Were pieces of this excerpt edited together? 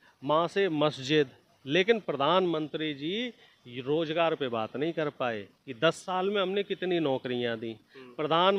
no; 0 cuts

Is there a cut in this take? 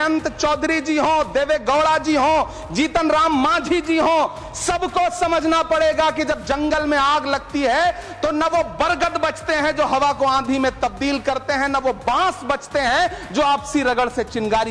no; 0 cuts

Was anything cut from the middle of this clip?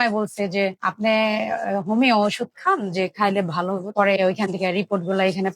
yes; 1 cut; at 3.9 s

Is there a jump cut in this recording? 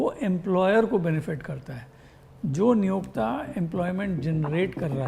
no; 0 cuts

